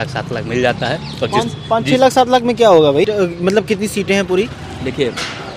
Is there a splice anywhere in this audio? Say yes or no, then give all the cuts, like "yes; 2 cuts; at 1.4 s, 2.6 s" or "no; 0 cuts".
yes; 1 cut; at 3.1 s